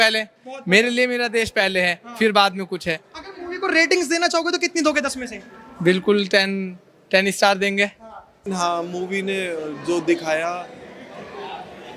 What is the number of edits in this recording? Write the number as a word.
one